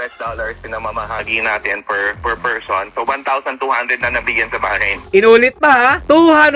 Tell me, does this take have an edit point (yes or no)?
yes